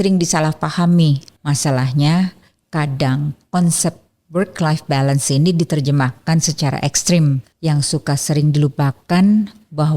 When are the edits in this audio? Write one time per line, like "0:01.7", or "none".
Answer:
0:07.5